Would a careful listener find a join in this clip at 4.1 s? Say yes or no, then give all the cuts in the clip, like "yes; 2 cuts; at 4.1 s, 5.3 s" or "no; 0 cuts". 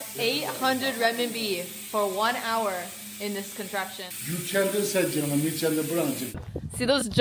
yes; 2 cuts; at 4.1 s, 6.2 s